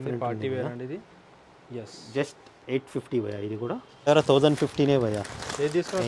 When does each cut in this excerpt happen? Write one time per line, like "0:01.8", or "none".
0:04.1